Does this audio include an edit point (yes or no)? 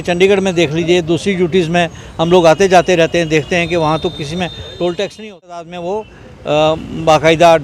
yes